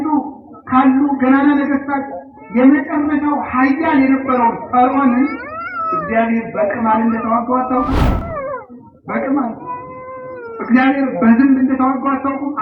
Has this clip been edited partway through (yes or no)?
no